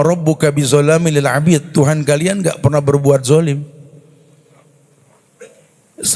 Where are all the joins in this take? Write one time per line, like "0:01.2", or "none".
none